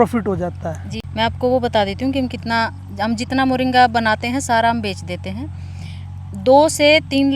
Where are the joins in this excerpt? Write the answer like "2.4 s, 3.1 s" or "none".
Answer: 0.9 s